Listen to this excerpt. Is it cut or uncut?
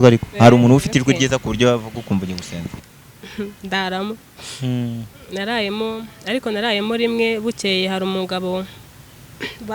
cut